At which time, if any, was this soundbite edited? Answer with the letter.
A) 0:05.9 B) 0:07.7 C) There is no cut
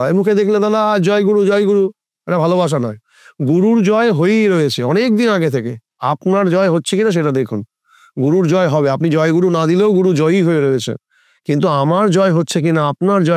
A